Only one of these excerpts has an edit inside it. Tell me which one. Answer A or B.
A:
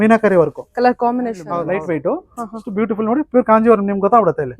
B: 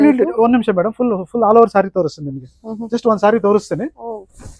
A